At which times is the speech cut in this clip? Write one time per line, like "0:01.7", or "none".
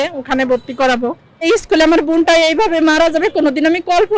0:01.4